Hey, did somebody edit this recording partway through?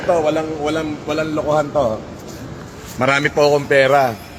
no; 0 cuts

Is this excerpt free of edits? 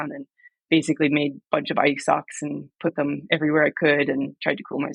yes; 0 cuts

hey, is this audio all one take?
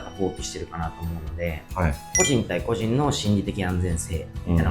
no; 1 cut; at 2.0 s

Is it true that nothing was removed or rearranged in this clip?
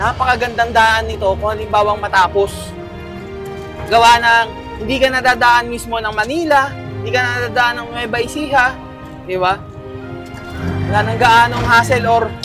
yes; 0 cuts

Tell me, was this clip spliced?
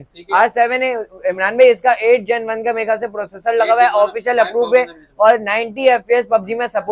no; 0 cuts

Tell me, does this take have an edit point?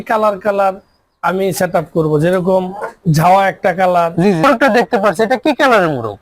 yes; 1 cut; at 4.4 s

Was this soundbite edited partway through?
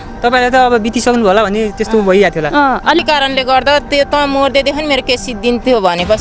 yes; 1 cut; at 3.0 s

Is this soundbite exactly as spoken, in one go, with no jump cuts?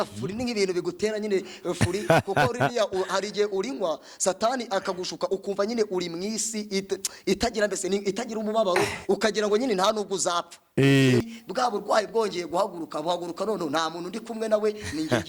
no; 1 cut; at 11.2 s

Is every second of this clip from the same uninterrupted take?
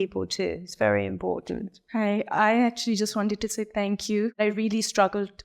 no; 2 cuts; at 1.8 s, 4.4 s

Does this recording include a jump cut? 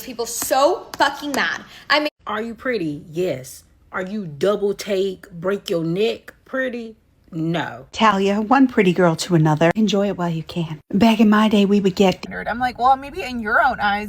yes; 3 cuts; at 2.1 s, 8.2 s, 12.2 s

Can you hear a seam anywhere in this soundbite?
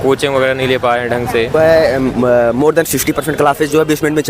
yes; 1 cut; at 1.5 s

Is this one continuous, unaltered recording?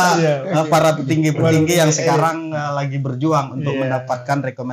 yes; 0 cuts

